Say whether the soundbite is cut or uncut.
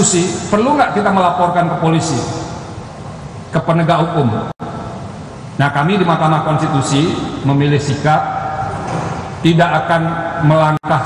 uncut